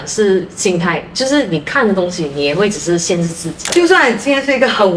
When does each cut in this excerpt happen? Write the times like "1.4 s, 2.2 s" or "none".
3.7 s